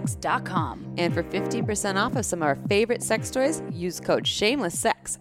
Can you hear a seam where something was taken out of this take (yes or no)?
no